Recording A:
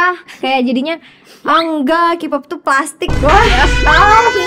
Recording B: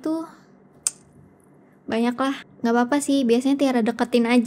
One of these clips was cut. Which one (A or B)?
B